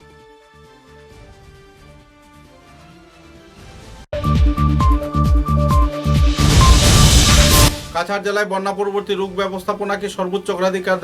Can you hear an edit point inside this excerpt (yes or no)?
yes